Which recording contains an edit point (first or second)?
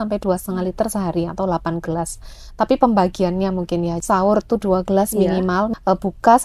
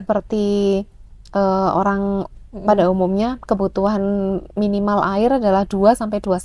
first